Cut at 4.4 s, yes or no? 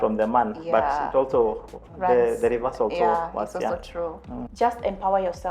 yes